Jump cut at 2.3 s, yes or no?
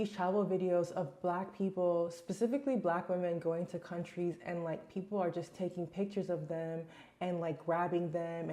no